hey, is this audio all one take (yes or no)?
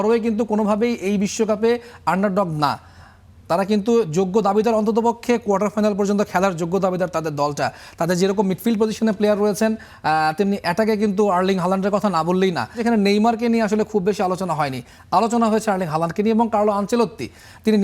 no